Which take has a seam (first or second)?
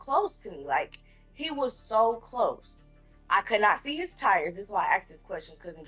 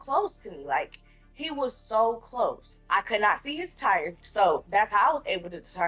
second